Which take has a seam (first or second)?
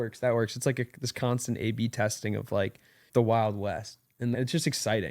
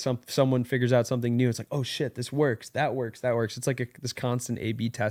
first